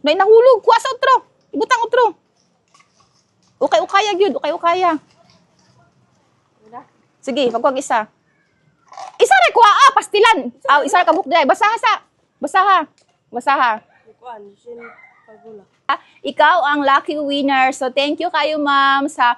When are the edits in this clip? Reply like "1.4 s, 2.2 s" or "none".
15.9 s